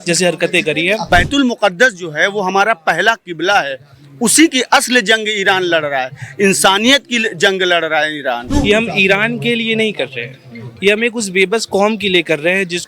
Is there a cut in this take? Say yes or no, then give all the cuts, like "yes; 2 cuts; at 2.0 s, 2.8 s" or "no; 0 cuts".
yes; 2 cuts; at 1.1 s, 8.4 s